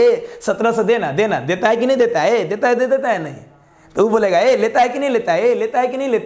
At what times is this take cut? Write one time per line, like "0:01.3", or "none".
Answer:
none